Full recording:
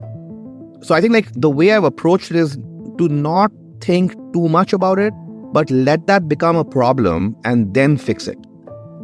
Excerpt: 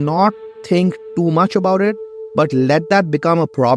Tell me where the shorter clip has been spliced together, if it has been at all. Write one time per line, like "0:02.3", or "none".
none